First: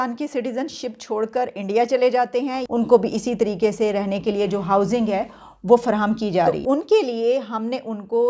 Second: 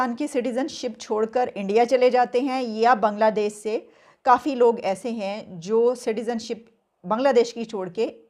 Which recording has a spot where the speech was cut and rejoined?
first; 2 cuts; at 2.6 s, 6.5 s

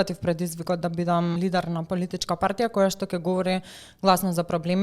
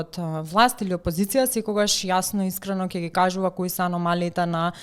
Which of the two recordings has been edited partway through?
first; 1 cut; at 1.3 s

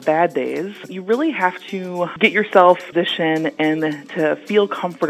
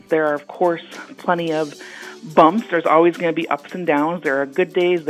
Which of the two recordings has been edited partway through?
first; 3 cuts; at 0.9 s, 2.1 s, 2.9 s

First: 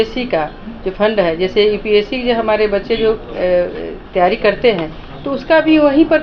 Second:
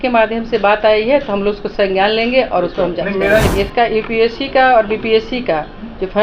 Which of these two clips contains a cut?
second; 1 cut; at 3.5 s

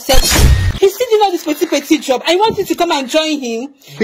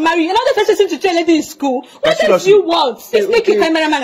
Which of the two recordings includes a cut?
second; 1 cut; at 3.1 s

